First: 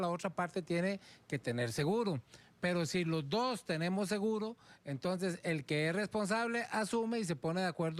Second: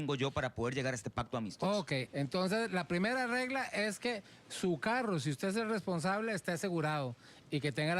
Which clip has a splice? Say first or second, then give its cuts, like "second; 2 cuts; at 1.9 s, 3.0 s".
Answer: second; 1 cut; at 2.1 s